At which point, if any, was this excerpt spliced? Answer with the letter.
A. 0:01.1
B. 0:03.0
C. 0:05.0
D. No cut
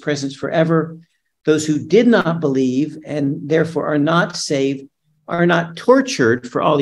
D